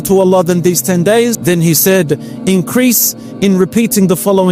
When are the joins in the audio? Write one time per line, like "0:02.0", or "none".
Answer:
0:01.4